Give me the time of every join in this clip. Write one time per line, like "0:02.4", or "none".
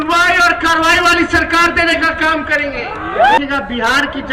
0:03.4

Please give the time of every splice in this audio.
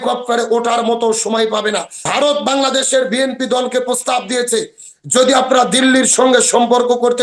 0:01.9

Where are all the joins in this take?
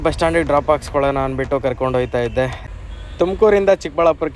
0:02.6

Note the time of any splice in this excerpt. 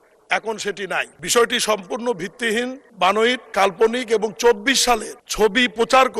0:01.2
0:02.8
0:03.4
0:05.2

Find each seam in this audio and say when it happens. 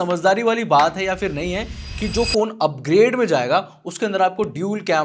none

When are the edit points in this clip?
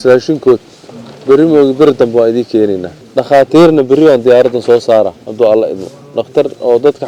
0:02.9

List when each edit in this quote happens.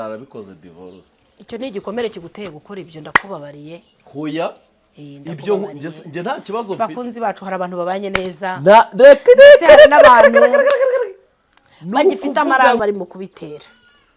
0:12.8

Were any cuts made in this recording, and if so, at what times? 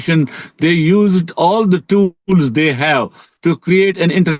none

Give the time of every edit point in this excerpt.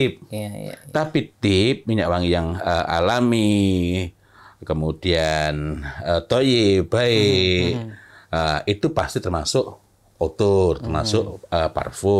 none

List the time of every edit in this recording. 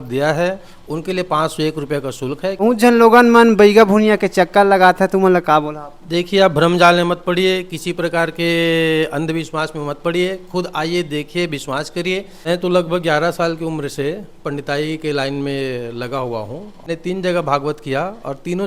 0:02.6
0:12.4
0:16.9

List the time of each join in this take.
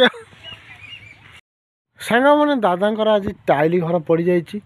0:01.5

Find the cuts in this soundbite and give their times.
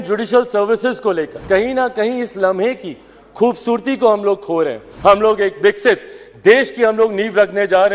0:01.3
0:04.8

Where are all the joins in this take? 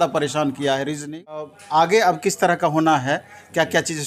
0:01.6

